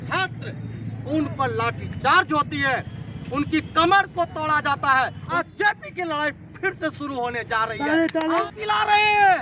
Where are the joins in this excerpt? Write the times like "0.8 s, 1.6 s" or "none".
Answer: 5.4 s, 8.5 s